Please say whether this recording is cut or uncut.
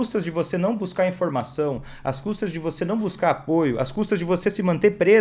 uncut